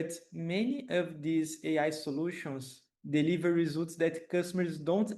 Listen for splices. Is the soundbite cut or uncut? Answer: uncut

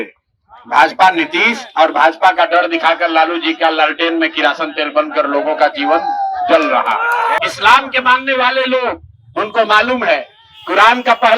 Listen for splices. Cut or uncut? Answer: cut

